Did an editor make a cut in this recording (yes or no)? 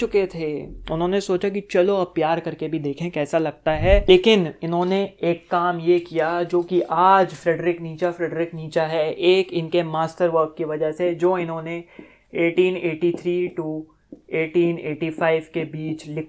yes